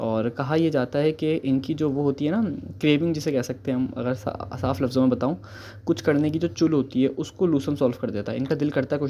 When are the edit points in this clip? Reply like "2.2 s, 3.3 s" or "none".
none